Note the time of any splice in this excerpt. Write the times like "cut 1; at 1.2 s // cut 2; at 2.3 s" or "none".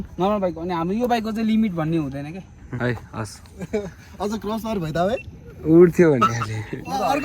cut 1; at 2.7 s